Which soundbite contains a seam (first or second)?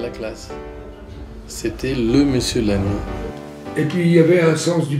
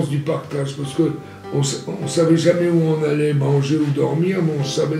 first